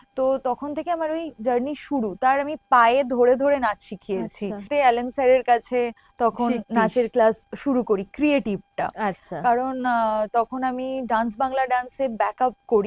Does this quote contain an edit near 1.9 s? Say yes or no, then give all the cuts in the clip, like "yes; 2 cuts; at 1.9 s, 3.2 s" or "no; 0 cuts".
no; 1 cut; at 4.6 s